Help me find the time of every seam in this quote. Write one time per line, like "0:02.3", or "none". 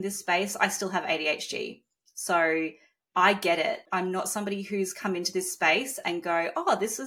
0:03.8

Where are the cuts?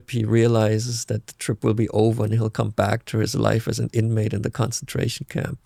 none

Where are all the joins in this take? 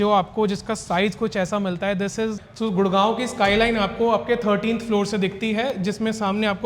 0:02.4

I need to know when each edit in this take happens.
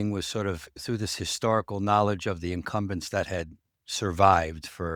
none

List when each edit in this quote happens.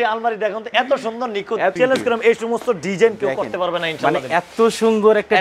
0:01.8

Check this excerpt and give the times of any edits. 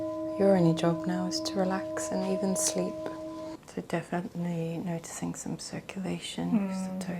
0:03.6

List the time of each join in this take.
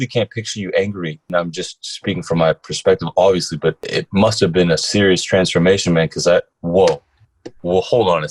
0:01.3
0:03.8
0:04.8

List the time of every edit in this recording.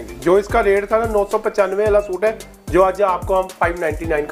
none

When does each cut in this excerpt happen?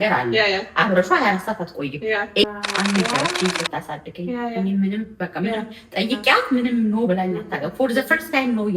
0:02.4

